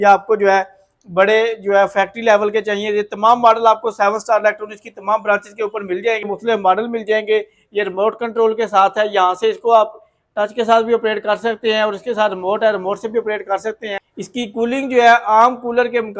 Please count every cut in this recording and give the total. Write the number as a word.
two